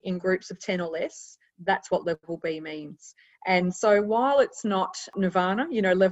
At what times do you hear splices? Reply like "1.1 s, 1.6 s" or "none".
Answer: 5.1 s